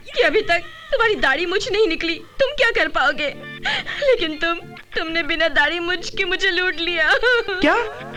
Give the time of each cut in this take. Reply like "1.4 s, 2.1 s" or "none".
none